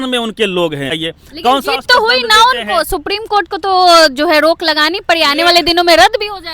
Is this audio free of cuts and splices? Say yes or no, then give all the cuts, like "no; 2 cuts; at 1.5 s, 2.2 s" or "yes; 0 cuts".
no; 1 cut; at 1.0 s